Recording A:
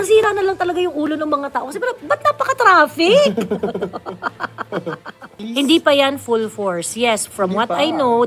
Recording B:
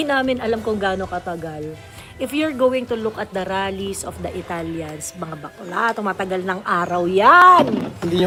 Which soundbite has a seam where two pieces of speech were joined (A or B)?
A